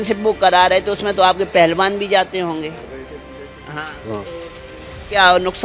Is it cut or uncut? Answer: uncut